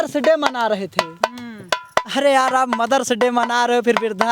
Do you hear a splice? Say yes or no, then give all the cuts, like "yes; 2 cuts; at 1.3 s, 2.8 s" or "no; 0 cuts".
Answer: no; 0 cuts